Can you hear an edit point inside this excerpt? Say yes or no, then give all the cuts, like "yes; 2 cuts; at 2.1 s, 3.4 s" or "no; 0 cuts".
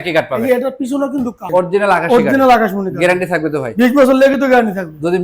yes; 1 cut; at 1.4 s